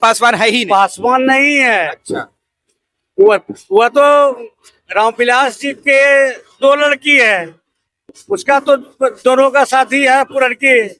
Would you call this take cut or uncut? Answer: uncut